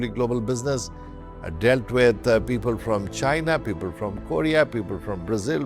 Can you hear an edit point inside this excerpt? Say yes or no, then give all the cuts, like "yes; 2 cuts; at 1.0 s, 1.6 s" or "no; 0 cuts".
no; 0 cuts